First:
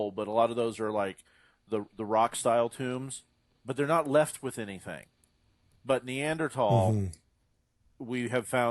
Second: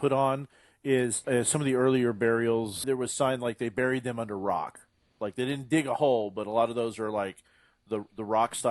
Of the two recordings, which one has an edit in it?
second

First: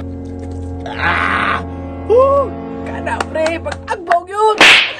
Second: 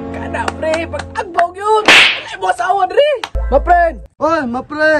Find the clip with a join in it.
second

